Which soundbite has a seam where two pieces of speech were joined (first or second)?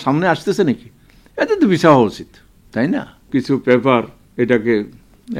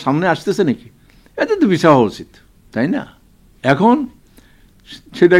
first